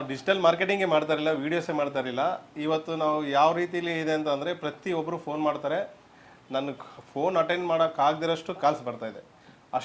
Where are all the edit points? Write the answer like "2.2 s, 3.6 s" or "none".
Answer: none